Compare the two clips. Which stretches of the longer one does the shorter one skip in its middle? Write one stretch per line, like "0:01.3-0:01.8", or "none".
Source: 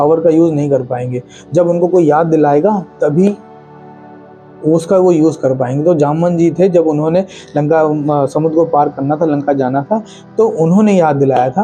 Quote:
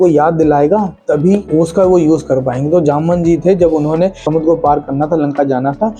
0:03.4-0:04.6
0:07.4-0:08.3